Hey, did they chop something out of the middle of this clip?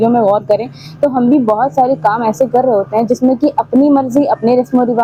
no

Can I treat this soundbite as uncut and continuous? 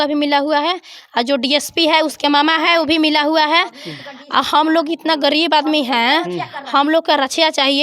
yes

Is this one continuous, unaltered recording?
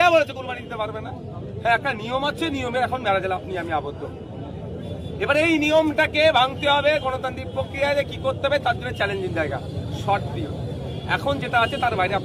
yes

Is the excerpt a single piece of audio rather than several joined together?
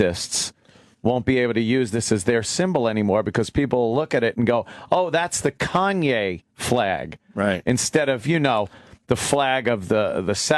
no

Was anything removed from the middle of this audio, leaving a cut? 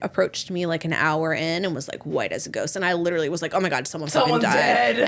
no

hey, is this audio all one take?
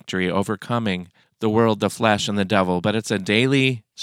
yes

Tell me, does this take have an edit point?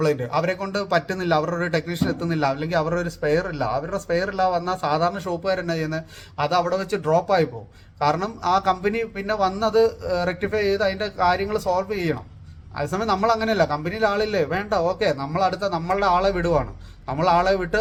no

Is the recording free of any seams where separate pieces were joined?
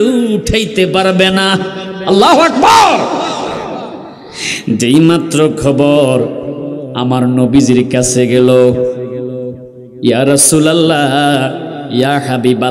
yes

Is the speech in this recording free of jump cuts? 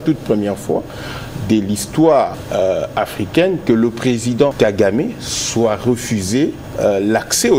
no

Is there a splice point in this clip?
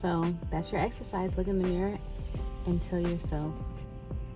no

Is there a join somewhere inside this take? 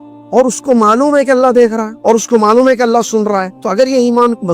yes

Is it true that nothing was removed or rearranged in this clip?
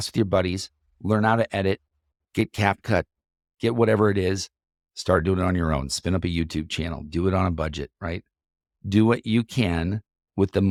yes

